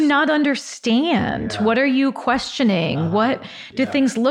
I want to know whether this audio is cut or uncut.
uncut